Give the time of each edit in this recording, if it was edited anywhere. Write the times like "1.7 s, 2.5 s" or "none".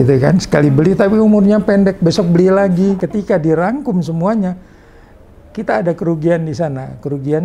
3.0 s